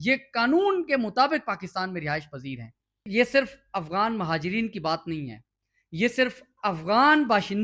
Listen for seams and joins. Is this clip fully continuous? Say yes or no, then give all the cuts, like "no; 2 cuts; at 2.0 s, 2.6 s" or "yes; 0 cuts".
no; 1 cut; at 2.9 s